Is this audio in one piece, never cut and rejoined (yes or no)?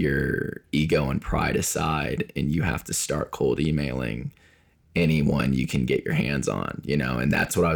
yes